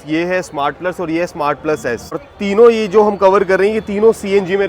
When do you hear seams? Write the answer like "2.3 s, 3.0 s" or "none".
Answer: 2.2 s